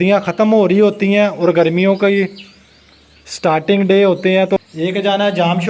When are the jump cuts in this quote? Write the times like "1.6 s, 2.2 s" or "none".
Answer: 4.6 s